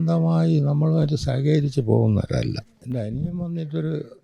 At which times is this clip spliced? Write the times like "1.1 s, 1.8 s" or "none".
2.8 s